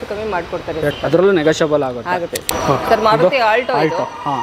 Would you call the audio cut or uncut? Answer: cut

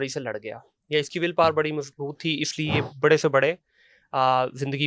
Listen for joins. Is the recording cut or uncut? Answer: uncut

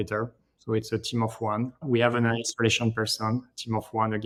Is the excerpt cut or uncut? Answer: uncut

